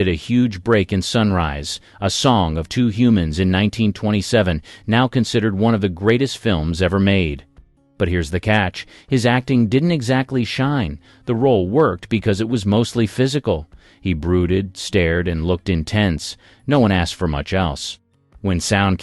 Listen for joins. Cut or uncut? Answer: cut